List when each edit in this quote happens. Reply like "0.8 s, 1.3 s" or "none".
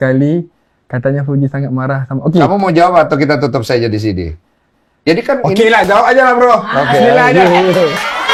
none